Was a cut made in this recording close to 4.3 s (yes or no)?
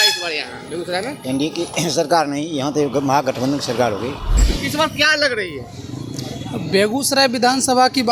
yes